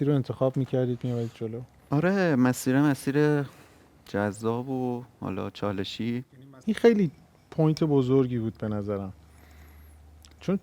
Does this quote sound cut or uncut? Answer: cut